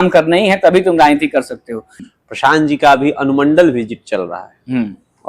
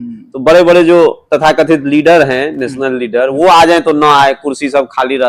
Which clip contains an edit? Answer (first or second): first